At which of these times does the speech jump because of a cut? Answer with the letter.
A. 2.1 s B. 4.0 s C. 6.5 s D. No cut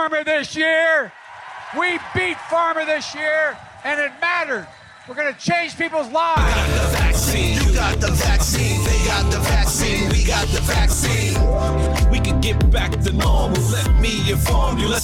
C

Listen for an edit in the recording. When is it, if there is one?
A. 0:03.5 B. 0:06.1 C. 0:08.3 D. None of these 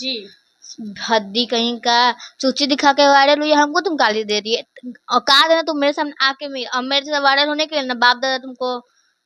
D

